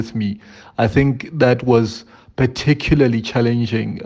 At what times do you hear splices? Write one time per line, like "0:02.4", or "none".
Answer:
none